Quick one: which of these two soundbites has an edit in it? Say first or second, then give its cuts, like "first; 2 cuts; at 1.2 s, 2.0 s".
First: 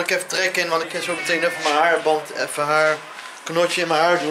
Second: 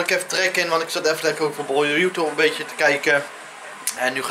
first; 1 cut; at 0.9 s